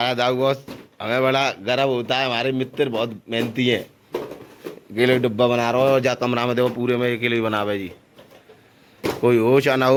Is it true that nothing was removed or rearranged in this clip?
yes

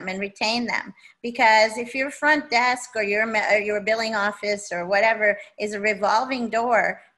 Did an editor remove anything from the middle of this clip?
no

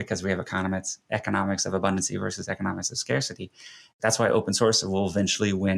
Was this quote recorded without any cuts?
no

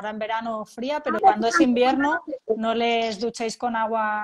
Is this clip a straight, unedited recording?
no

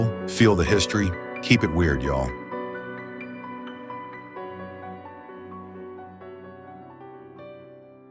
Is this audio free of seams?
no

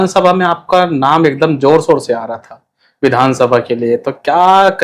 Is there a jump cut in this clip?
no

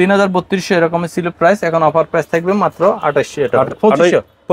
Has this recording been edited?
no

